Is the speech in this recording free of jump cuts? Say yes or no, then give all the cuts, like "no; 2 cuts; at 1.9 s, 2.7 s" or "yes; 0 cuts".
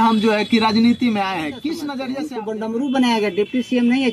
no; 1 cut; at 2.1 s